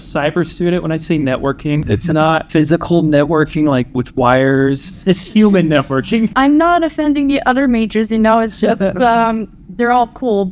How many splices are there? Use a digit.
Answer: 3